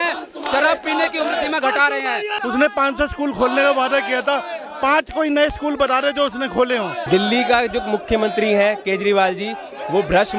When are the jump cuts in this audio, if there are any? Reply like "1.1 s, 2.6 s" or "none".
2.3 s, 7.0 s